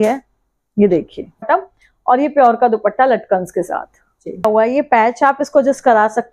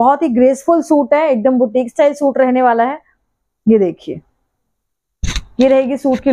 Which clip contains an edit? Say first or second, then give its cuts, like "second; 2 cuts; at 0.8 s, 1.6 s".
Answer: first; 2 cuts; at 1.5 s, 4.4 s